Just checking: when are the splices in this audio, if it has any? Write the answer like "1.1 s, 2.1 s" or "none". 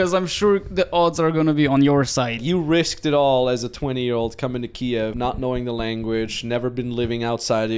2.4 s, 5.4 s